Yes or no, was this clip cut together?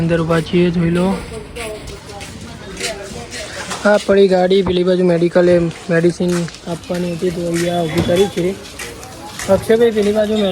no